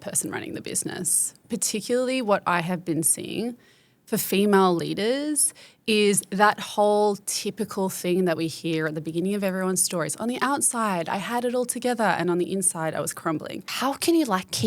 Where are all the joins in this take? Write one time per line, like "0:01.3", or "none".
0:01.4
0:13.7